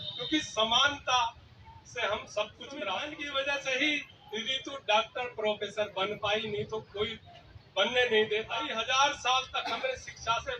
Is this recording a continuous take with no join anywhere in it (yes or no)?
no